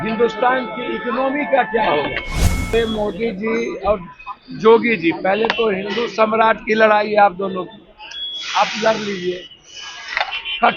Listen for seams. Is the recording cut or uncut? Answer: cut